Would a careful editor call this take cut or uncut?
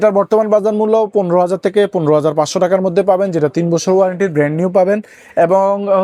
uncut